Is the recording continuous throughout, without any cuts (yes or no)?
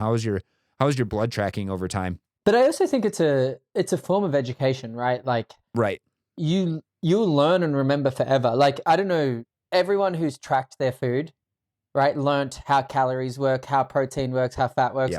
no